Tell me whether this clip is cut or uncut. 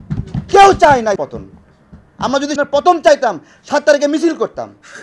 cut